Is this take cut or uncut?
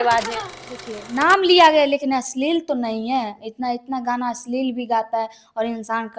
cut